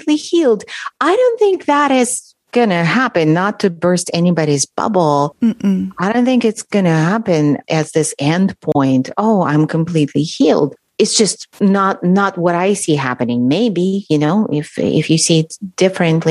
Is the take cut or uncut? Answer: cut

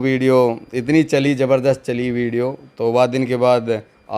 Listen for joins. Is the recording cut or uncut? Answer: uncut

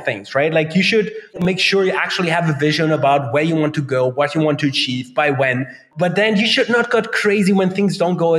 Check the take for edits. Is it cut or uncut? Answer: cut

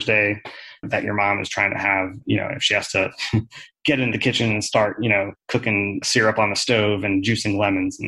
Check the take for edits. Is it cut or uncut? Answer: uncut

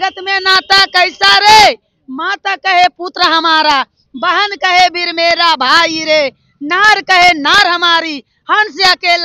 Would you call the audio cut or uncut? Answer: uncut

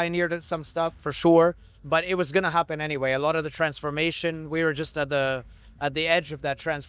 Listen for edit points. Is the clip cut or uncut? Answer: uncut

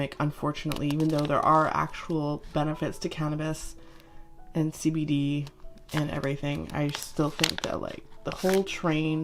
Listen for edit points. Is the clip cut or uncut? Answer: uncut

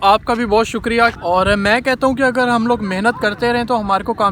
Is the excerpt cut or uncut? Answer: cut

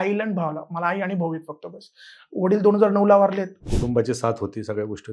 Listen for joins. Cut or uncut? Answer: cut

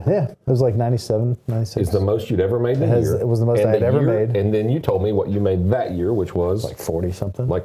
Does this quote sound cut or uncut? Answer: uncut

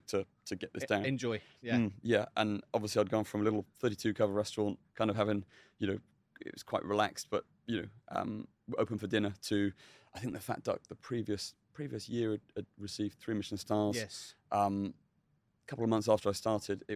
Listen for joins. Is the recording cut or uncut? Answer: uncut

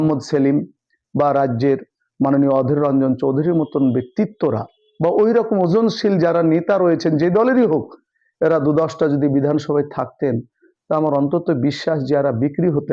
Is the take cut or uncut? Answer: uncut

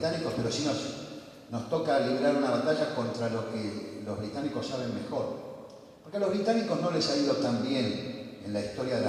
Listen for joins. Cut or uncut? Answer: cut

